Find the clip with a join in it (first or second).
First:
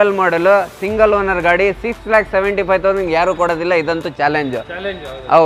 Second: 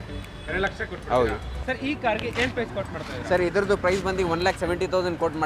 second